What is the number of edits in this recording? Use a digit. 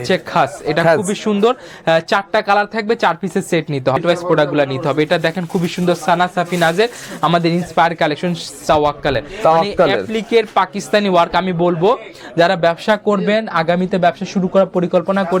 2